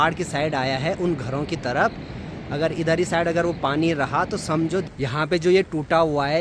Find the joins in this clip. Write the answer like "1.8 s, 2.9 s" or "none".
4.9 s

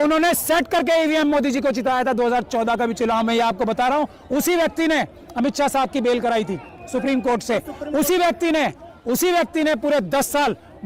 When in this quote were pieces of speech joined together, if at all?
none

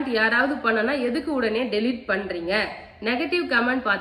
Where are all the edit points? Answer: none

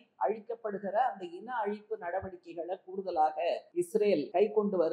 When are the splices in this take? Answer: 4.0 s

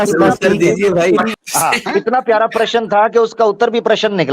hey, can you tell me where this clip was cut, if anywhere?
1.4 s

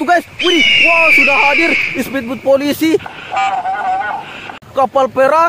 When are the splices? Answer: 4.4 s

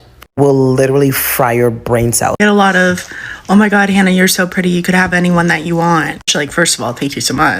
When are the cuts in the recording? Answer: 2.3 s

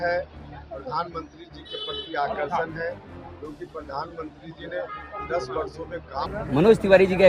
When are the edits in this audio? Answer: 6.3 s

